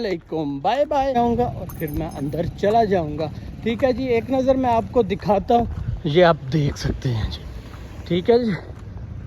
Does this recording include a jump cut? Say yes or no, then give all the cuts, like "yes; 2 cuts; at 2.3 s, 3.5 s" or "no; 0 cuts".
yes; 1 cut; at 1.2 s